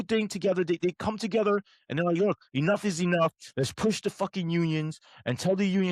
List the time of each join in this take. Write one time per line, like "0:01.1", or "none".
none